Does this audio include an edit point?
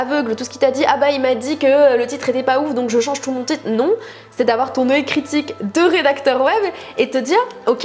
no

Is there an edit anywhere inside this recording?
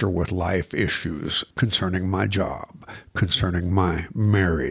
yes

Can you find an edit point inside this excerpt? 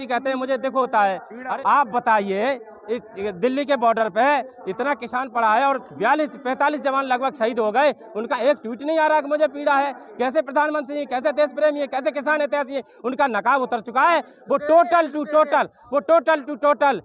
yes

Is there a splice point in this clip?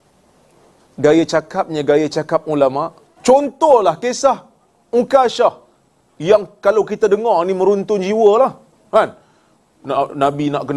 yes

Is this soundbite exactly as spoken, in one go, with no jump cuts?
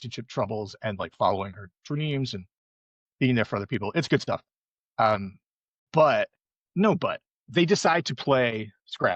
yes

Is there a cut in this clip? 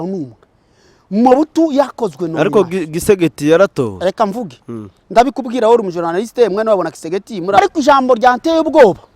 yes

